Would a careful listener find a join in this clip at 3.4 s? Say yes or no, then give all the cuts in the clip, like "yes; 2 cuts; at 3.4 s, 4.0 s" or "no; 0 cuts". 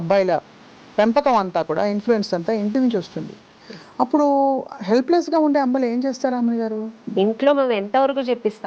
no; 1 cut; at 7.1 s